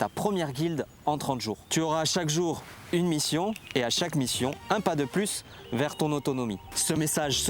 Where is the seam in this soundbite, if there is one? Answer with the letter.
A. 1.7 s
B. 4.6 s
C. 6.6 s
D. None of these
A